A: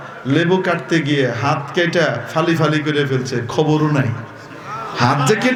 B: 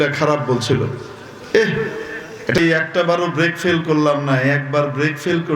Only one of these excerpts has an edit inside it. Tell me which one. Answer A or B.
B